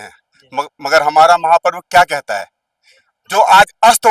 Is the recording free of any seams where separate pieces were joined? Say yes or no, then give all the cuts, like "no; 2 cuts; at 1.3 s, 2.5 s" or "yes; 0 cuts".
yes; 0 cuts